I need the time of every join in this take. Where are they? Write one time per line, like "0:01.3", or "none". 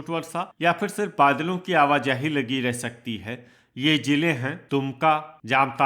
0:04.9